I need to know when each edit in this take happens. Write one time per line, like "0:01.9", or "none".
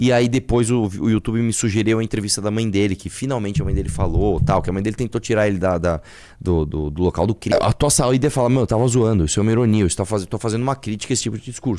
0:07.5